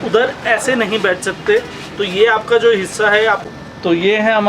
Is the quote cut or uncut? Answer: cut